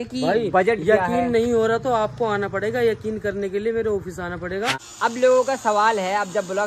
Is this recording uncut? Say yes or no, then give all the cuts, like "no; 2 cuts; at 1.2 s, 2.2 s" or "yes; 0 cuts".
no; 1 cut; at 4.8 s